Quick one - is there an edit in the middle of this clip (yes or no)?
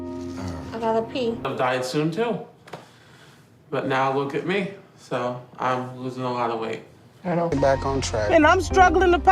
yes